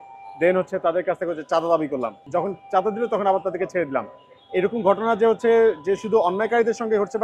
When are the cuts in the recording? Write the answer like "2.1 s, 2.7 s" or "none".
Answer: 2.2 s